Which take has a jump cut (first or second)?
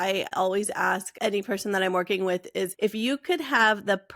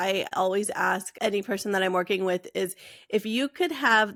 first